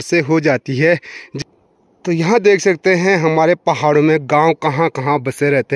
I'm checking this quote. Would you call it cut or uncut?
cut